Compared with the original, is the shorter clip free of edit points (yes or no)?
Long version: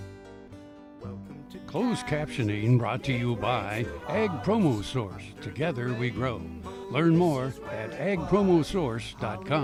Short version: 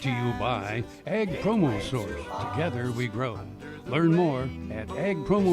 yes